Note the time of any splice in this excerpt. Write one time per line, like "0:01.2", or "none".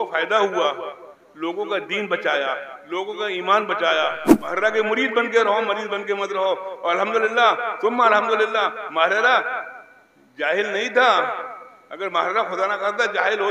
0:04.3